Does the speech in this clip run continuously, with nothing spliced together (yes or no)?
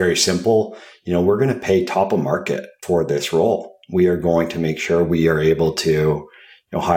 no